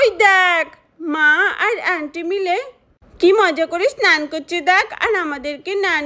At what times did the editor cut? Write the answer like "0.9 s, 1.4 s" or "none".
none